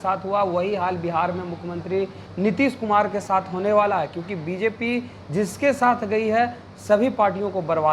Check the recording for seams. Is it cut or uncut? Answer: uncut